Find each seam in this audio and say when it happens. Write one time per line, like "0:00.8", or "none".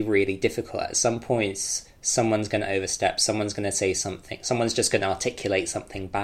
none

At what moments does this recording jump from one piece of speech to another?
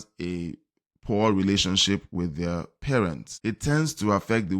0:03.3

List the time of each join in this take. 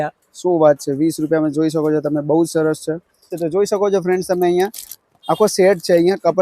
0:03.3

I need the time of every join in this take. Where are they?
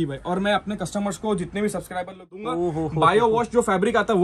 0:02.4

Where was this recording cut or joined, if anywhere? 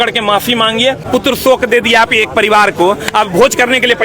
0:01.0

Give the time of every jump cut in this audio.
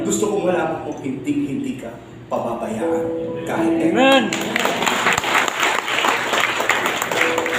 none

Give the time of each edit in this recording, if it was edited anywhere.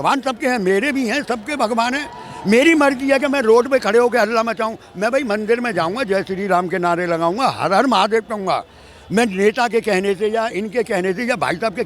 none

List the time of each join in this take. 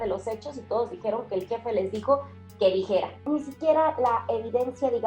0:03.2

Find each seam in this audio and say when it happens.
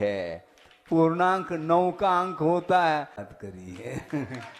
0:03.2

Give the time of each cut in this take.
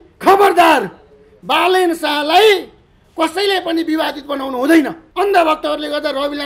0:05.0

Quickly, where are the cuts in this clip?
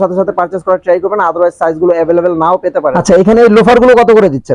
0:03.0

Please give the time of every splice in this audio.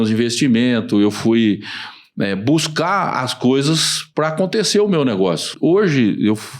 0:05.5

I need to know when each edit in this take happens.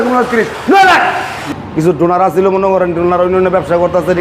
0:01.4

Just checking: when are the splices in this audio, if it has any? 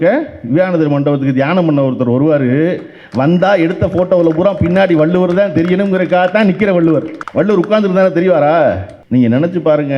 0:07.2
0:08.9

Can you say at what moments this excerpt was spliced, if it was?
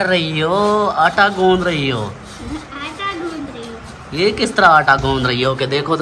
none

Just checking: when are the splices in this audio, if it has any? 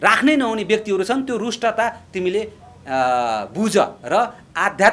none

